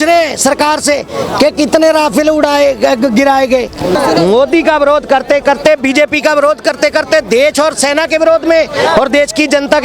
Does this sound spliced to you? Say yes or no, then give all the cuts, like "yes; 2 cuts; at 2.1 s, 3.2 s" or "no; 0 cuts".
yes; 1 cut; at 4.0 s